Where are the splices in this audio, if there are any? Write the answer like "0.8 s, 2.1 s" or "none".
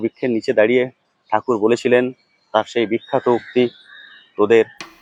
none